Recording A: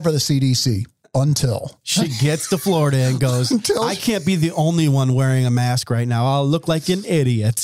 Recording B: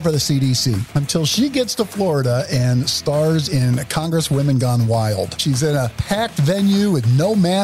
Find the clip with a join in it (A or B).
B